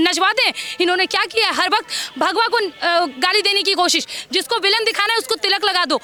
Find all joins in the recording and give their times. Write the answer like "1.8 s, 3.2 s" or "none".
none